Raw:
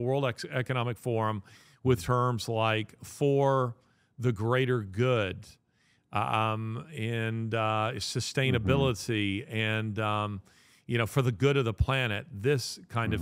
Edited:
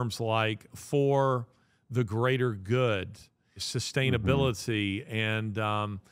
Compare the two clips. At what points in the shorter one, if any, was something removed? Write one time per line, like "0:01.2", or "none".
0:03.7